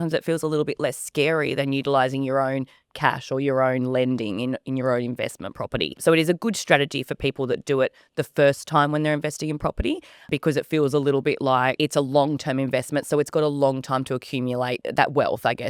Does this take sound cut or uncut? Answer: cut